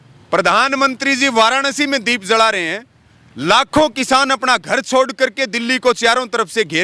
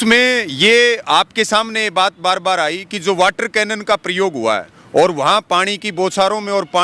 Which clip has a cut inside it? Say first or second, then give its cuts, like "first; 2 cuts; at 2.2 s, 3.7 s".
second; 1 cut; at 4.7 s